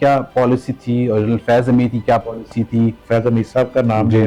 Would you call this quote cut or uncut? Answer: cut